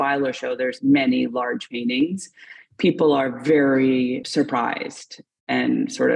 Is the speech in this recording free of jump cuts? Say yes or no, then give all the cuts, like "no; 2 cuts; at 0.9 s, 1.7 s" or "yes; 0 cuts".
yes; 0 cuts